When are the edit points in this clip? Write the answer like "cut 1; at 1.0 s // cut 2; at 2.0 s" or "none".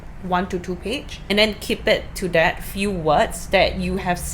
cut 1; at 1.1 s